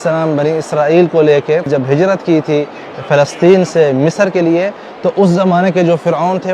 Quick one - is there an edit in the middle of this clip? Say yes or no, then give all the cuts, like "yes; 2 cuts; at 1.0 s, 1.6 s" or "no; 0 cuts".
yes; 1 cut; at 1.7 s